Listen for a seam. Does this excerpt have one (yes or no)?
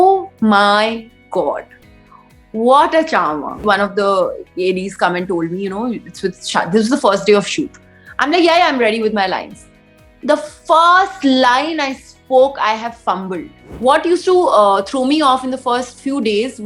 yes